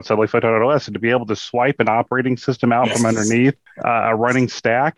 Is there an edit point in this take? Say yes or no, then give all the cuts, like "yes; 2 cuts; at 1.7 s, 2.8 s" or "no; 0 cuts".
yes; 1 cut; at 3.7 s